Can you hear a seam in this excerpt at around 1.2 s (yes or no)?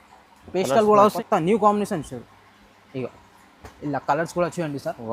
yes